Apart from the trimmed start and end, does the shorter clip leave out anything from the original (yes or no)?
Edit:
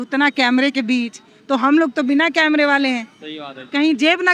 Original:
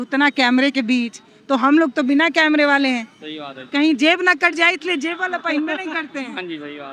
no